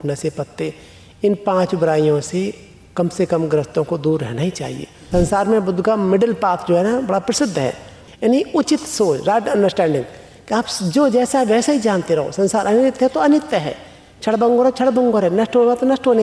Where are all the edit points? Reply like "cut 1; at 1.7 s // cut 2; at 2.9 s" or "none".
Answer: cut 1; at 5.1 s // cut 2; at 8.1 s